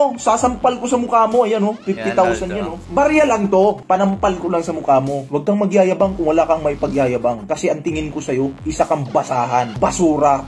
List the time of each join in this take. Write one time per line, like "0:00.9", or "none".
0:02.8